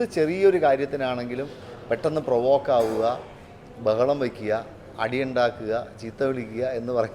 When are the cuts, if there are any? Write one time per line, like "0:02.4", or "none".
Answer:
none